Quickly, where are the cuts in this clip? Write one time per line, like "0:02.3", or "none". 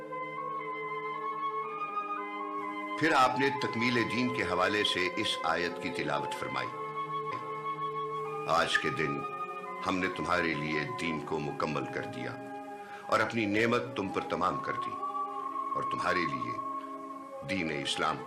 none